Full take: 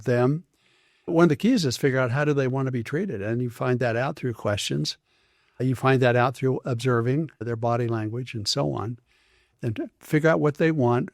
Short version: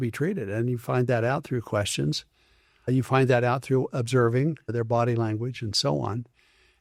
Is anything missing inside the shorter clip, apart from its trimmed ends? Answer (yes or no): no